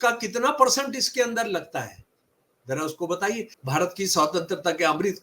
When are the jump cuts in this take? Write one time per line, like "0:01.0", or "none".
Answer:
0:03.5